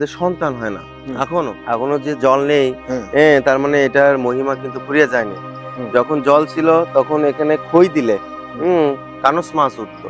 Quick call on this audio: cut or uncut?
cut